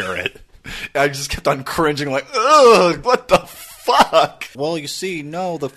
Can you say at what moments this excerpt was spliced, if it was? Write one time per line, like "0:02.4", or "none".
0:03.0
0:04.5